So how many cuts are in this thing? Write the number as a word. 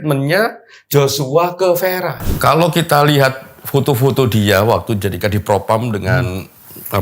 one